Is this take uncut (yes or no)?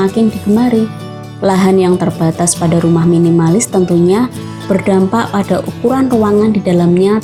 yes